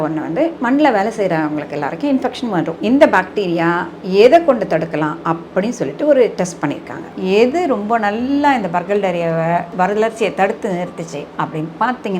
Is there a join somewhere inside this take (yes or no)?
yes